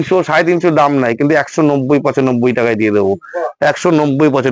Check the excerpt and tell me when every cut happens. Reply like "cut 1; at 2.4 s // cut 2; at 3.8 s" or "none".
none

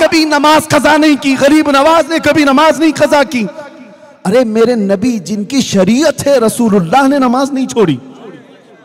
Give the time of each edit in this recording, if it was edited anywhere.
none

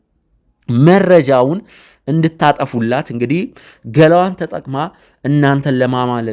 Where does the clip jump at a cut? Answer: none

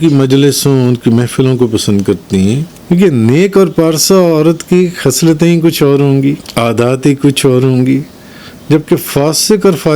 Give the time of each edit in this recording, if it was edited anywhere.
cut 1; at 2.7 s // cut 2; at 6.5 s

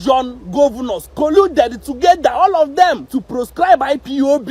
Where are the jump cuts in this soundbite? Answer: cut 1; at 3.1 s

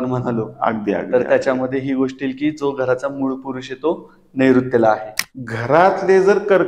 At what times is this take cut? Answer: cut 1; at 5.1 s

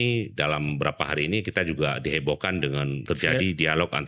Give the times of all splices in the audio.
cut 1; at 3.0 s

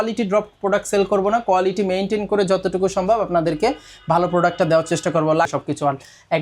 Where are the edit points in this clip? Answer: cut 1; at 5.5 s

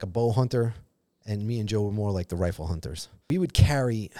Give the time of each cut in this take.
cut 1; at 3.1 s

